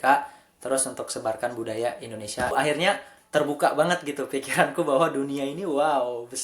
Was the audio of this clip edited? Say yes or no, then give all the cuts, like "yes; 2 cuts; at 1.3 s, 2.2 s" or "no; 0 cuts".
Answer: yes; 1 cut; at 2.5 s